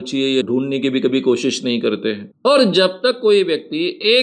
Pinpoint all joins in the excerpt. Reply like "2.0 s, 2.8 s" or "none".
2.3 s